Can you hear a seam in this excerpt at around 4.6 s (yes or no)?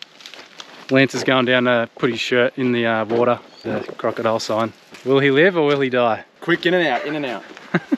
no